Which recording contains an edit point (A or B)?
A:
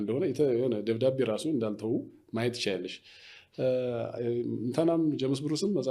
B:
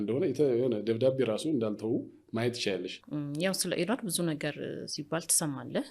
B